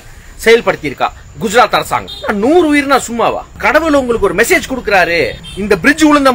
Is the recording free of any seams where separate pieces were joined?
no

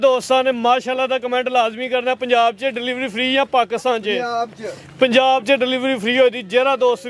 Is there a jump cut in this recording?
no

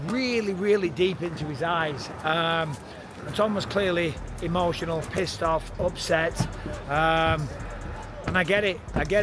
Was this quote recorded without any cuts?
yes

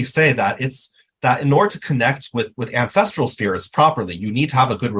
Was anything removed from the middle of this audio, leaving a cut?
yes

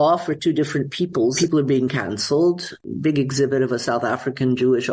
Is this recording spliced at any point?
yes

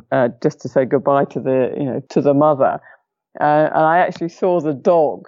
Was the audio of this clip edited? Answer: yes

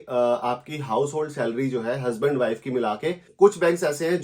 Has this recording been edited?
yes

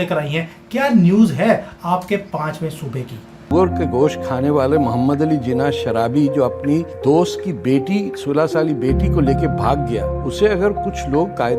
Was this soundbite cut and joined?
yes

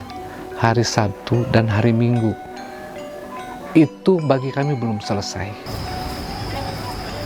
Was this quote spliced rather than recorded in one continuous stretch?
no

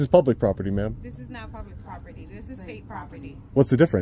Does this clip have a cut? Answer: no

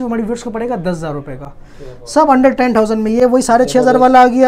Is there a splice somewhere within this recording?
no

